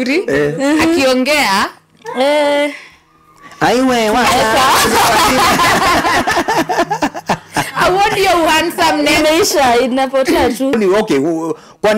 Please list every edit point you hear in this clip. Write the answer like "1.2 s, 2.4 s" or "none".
10.7 s